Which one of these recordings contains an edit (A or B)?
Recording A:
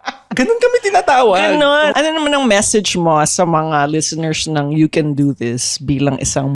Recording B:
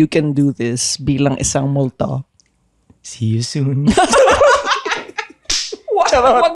A